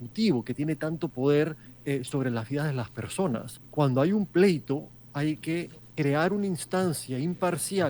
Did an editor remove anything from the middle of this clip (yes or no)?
yes